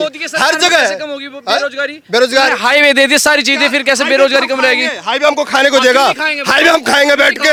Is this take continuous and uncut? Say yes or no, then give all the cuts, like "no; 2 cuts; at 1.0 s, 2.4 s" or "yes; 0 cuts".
yes; 0 cuts